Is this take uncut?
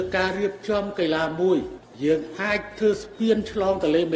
no; 1 cut; at 1.8 s

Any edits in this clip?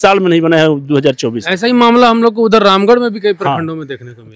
no; 0 cuts

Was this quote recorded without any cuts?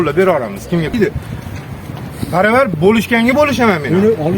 no; 1 cut; at 0.9 s

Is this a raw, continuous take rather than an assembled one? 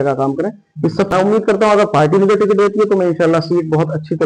no; 1 cut; at 1.1 s

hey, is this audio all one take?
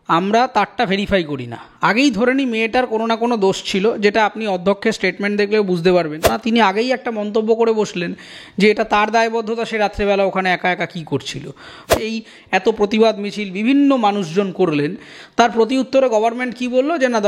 no; 2 cuts; at 6.4 s, 11.9 s

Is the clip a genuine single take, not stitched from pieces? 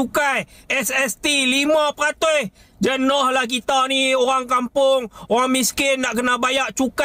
yes; 0 cuts

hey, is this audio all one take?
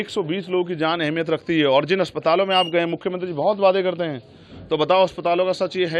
yes; 0 cuts

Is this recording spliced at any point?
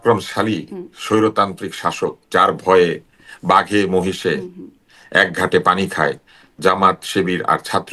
no; 0 cuts

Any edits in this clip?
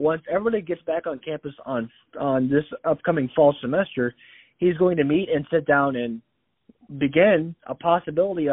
no; 0 cuts

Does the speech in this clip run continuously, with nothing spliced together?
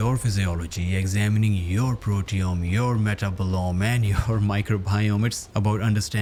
yes; 0 cuts

